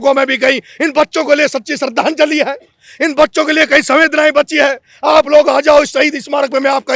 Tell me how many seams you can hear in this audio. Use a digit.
0